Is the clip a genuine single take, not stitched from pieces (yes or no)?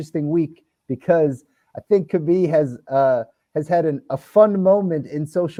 yes